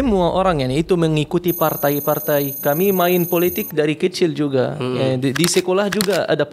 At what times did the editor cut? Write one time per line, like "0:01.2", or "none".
none